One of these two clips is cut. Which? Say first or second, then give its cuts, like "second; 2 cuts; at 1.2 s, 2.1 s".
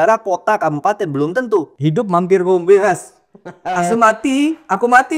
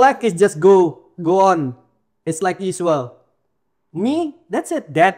first; 1 cut; at 1.7 s